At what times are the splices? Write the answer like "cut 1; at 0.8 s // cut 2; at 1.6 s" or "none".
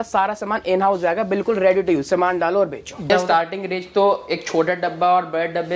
cut 1; at 3.1 s